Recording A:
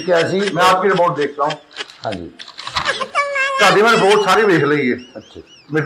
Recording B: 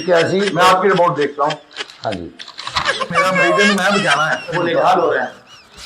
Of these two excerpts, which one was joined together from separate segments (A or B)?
B